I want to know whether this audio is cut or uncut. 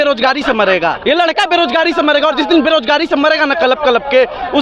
cut